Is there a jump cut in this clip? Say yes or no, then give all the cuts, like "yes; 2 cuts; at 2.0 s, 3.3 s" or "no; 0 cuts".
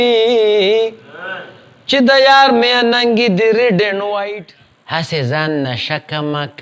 yes; 1 cut; at 4.3 s